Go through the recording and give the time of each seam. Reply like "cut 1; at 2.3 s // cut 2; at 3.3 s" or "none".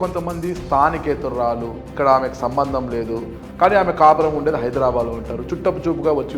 cut 1; at 1.8 s // cut 2; at 3.4 s